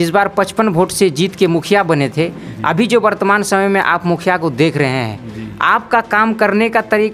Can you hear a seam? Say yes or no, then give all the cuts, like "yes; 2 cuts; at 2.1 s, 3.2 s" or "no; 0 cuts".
no; 0 cuts